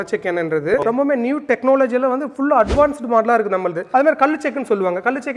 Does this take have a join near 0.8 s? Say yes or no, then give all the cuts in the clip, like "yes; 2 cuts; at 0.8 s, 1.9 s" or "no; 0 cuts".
yes; 2 cuts; at 0.8 s, 3.8 s